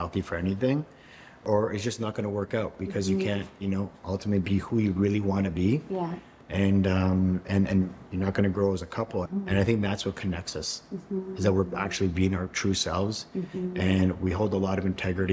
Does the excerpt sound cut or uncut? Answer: cut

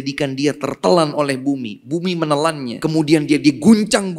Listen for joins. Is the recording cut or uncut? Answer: cut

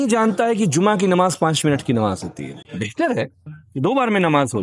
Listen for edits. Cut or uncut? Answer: uncut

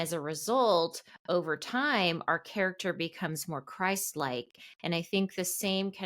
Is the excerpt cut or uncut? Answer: uncut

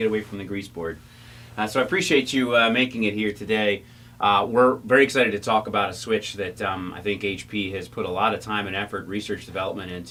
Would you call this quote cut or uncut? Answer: uncut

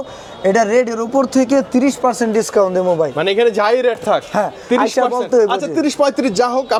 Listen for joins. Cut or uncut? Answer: uncut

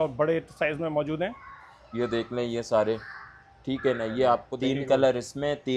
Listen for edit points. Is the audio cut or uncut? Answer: cut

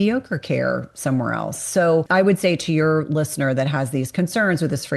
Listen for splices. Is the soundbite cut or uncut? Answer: cut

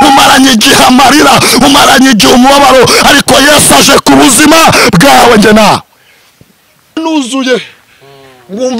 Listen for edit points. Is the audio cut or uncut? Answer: cut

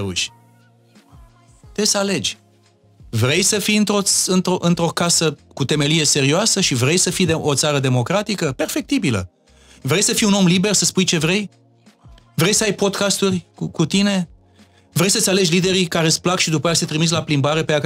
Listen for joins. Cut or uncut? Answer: uncut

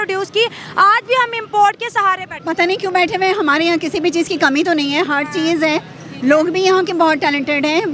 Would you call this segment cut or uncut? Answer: cut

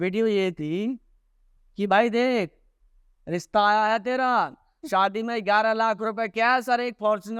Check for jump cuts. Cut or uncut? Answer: uncut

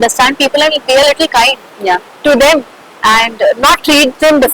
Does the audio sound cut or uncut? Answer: uncut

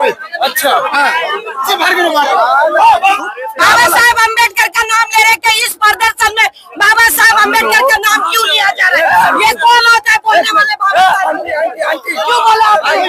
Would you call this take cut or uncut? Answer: cut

